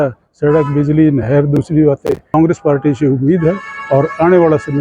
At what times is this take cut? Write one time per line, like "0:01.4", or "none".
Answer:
0:02.3